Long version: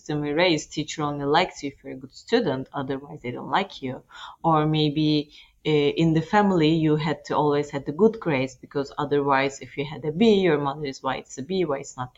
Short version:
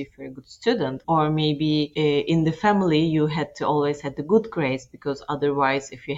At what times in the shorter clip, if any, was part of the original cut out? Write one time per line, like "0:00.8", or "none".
0:01.0
0:01.9